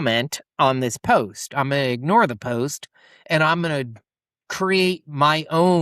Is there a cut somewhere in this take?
no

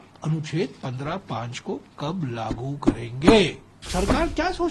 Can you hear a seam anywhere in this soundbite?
yes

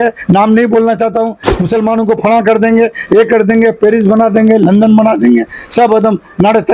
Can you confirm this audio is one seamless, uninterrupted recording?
yes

